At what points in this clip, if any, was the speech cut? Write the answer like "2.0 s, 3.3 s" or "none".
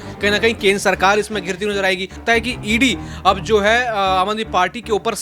2.2 s